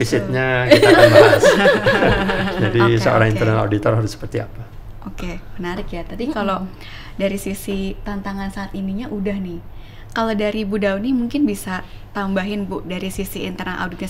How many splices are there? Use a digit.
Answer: 0